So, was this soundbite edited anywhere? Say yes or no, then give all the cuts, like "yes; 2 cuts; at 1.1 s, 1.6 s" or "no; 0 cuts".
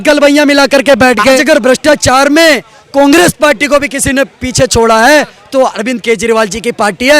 yes; 1 cut; at 1.4 s